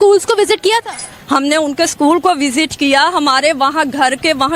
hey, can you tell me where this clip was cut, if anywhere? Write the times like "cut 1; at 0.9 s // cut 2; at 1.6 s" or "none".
none